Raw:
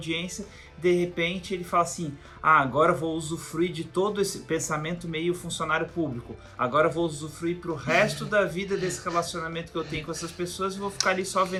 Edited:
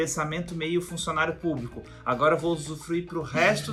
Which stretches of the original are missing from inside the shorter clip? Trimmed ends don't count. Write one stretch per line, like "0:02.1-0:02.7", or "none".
none